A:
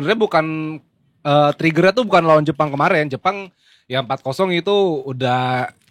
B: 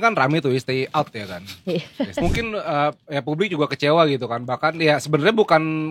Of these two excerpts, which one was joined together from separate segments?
B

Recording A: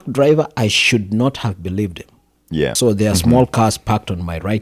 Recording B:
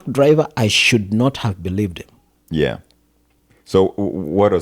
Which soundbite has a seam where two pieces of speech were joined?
A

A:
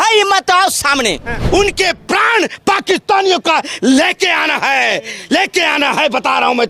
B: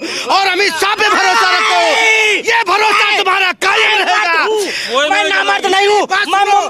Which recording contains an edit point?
A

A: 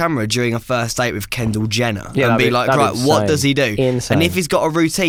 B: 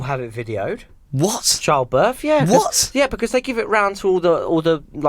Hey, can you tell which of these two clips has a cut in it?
B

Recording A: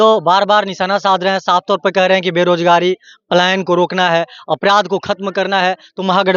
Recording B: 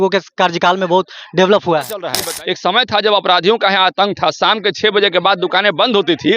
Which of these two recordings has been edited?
B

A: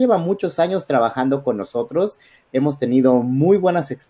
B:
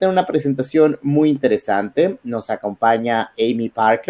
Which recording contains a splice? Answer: B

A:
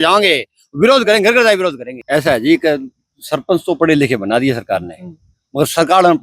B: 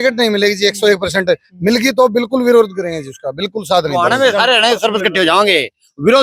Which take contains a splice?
A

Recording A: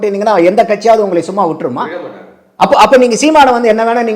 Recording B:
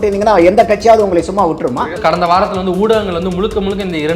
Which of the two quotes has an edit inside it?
B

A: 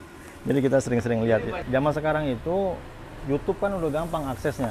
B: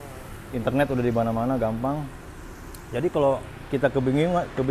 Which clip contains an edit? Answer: A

